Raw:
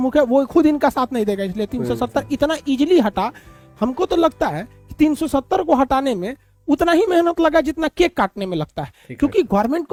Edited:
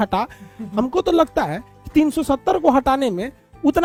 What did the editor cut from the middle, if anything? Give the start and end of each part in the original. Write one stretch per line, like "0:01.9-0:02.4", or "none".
none